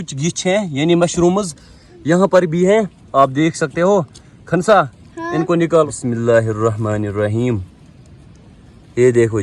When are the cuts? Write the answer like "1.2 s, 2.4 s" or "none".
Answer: 5.9 s

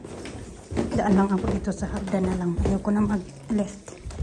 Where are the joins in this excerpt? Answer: none

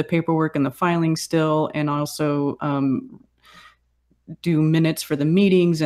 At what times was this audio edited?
1.9 s

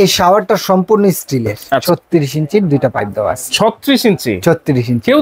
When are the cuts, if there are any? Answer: 1.8 s

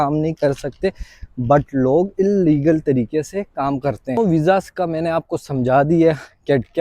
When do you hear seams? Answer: 4.2 s

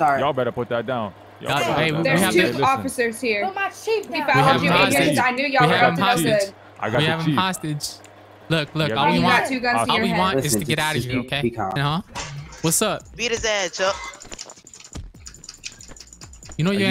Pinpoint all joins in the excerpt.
11.8 s

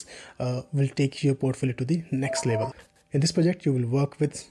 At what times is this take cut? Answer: 2.8 s

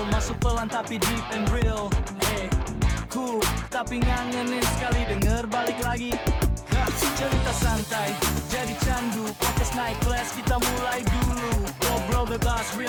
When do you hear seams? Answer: none

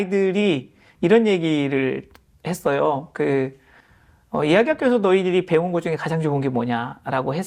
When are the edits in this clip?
none

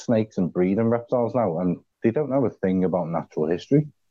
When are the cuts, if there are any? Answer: 1.9 s

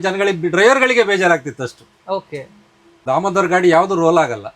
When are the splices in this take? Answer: 3.0 s

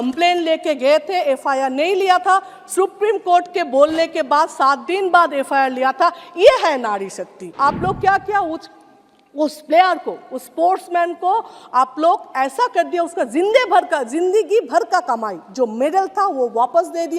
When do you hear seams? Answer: 7.5 s

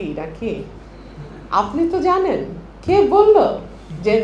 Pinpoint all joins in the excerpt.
none

